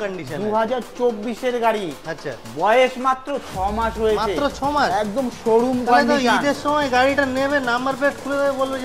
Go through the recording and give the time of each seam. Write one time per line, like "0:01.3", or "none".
none